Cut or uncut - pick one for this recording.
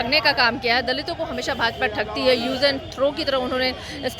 uncut